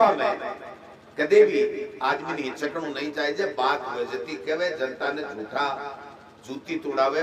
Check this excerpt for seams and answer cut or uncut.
uncut